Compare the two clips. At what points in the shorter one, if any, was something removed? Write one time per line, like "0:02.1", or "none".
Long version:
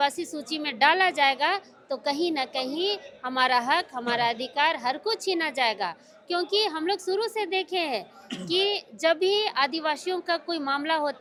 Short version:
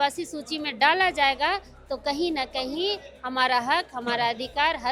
none